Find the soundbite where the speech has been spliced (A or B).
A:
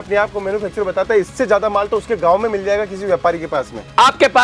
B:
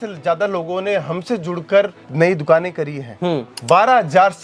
B